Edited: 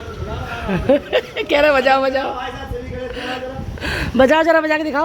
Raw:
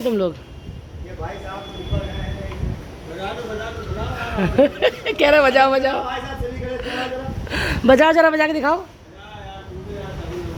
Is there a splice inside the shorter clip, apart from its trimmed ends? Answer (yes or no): no